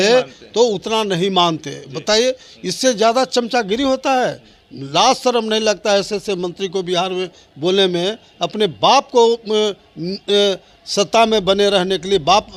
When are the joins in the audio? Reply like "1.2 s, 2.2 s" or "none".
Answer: none